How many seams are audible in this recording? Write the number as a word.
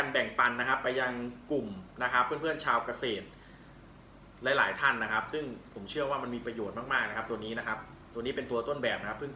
zero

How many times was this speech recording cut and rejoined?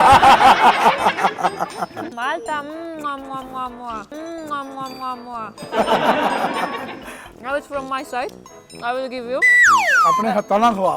one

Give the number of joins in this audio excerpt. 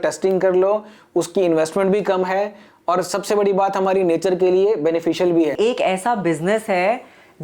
one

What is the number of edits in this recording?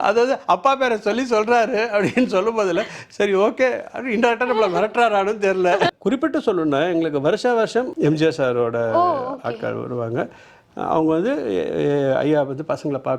two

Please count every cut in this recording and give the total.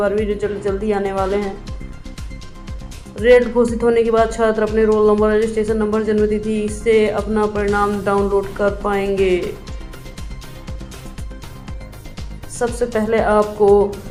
zero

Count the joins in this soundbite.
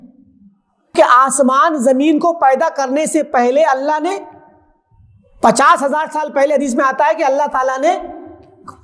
one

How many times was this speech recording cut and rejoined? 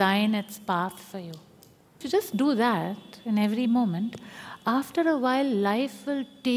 one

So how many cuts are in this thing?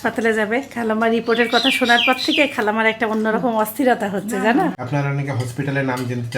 one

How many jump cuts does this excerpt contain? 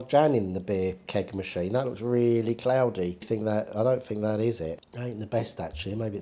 two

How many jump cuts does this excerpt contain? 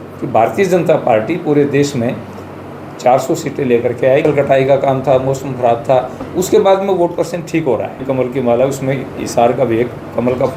two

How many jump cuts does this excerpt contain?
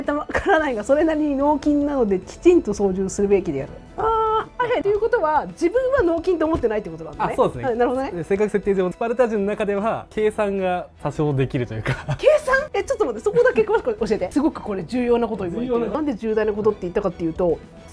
three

